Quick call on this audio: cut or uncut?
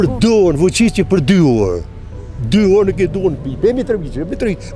uncut